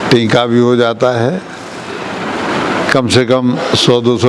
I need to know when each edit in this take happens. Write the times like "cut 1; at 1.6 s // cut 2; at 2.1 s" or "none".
none